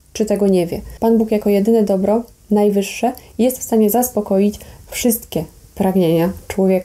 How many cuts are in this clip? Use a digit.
0